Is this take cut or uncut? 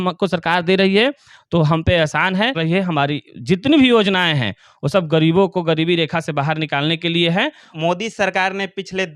cut